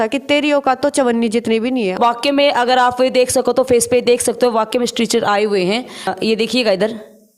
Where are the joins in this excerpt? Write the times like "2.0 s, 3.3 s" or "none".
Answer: 2.0 s, 6.1 s